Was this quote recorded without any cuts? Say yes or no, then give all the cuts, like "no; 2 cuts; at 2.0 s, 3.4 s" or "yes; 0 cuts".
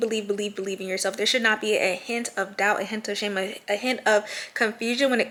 yes; 0 cuts